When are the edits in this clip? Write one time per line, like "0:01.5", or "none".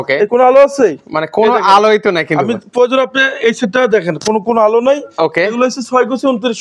none